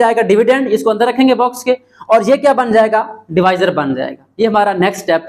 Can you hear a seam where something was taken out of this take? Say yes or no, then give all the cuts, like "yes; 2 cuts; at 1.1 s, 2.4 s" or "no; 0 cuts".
no; 0 cuts